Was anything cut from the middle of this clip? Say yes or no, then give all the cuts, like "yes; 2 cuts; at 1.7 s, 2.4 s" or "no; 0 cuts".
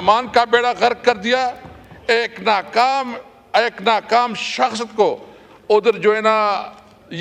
no; 0 cuts